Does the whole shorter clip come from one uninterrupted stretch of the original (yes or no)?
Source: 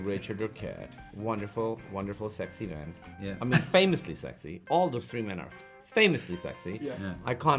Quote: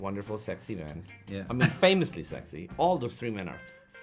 yes